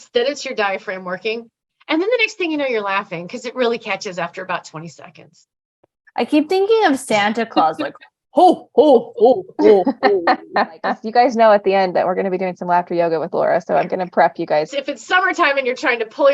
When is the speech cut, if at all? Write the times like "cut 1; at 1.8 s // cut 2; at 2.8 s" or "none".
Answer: cut 1; at 11.0 s // cut 2; at 14.7 s